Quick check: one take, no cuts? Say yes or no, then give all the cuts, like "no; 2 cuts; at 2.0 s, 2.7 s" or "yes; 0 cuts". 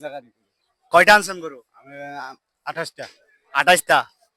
yes; 0 cuts